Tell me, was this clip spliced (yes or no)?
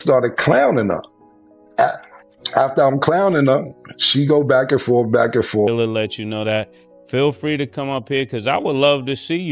yes